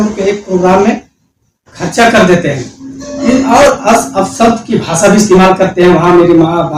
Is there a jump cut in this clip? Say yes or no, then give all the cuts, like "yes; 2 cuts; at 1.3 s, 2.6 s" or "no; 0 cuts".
no; 0 cuts